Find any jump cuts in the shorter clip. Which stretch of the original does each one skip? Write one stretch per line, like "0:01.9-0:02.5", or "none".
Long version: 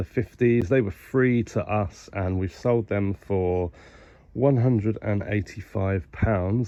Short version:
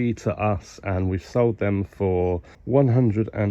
0:03.8-0:04.2